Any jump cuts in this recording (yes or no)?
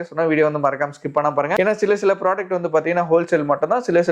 yes